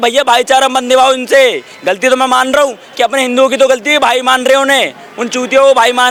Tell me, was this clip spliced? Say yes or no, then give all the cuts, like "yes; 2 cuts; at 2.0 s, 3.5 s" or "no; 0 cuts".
no; 0 cuts